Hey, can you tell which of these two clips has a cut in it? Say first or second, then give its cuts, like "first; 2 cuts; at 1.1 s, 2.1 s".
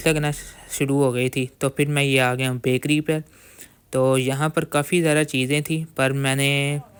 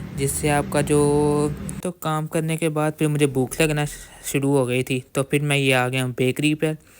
second; 1 cut; at 1.8 s